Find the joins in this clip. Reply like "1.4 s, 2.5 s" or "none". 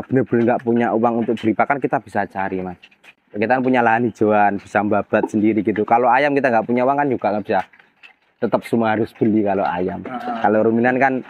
none